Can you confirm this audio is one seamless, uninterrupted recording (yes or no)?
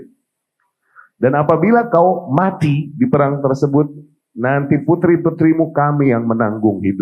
yes